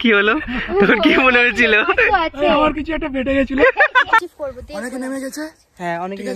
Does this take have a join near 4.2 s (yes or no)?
yes